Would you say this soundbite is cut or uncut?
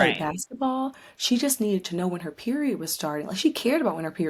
uncut